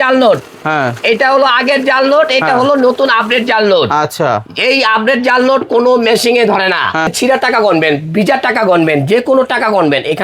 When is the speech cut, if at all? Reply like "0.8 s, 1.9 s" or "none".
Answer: 7.1 s